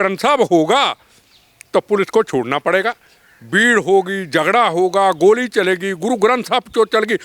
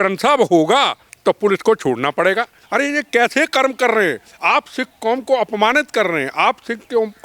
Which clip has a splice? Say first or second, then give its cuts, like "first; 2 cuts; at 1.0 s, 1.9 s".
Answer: second; 2 cuts; at 1.0 s, 2.6 s